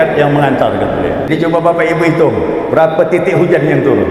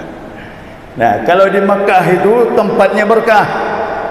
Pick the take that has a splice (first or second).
first